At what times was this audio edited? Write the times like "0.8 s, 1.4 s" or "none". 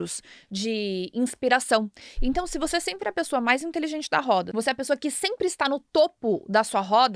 2.0 s, 4.5 s